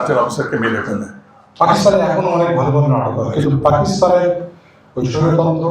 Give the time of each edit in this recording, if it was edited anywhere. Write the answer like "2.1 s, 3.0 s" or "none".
1.4 s